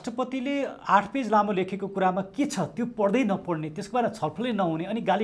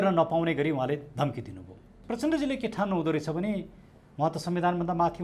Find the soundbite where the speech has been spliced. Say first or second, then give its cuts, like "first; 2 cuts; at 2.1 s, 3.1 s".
second; 1 cut; at 2.0 s